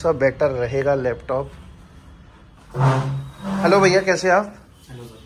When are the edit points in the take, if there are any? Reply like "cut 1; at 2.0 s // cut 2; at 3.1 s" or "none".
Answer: none

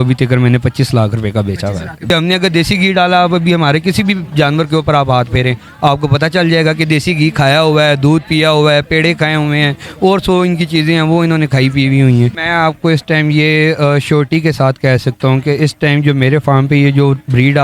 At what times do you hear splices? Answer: cut 1; at 2.0 s // cut 2; at 12.4 s

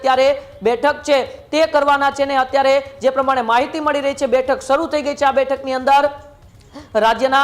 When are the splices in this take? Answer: none

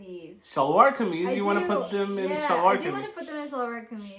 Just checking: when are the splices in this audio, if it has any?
none

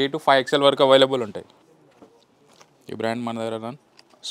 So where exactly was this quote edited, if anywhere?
cut 1; at 1.6 s

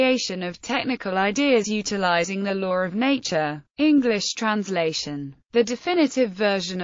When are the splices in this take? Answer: cut 1; at 1.0 s

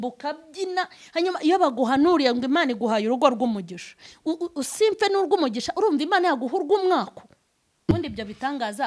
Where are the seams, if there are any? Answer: cut 1; at 7.9 s

